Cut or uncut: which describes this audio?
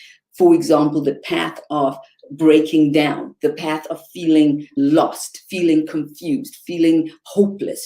cut